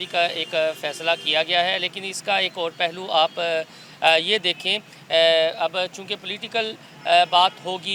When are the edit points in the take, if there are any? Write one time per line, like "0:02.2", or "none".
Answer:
none